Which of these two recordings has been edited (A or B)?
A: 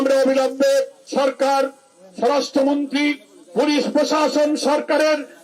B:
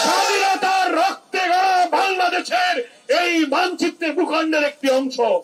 A